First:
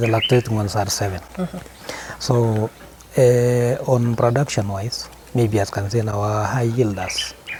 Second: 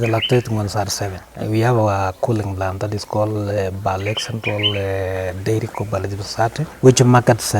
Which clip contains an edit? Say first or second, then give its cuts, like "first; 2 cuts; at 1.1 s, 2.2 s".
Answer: second; 2 cuts; at 1.2 s, 6.7 s